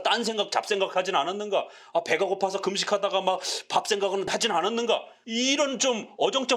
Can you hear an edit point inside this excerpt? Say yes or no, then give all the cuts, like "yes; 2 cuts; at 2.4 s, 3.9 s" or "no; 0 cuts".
yes; 2 cuts; at 4.3 s, 5.2 s